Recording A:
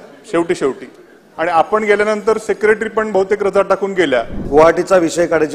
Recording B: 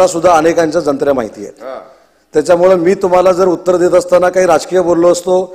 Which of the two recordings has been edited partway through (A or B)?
A